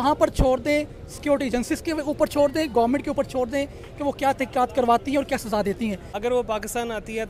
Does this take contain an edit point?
yes; 1 cut; at 6.1 s

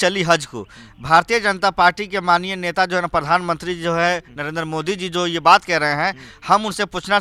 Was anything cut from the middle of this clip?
no; 0 cuts

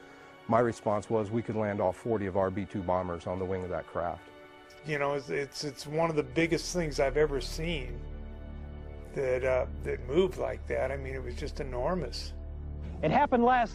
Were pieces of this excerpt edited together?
no; 0 cuts

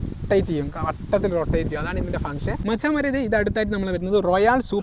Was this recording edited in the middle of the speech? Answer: yes; 1 cut; at 2.6 s

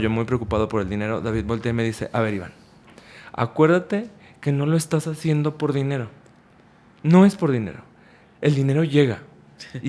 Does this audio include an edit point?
no; 0 cuts

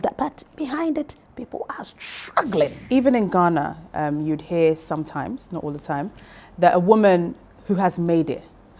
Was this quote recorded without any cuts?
no; 1 cut; at 2.8 s

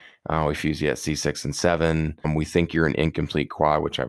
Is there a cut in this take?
yes; 1 cut; at 2.3 s

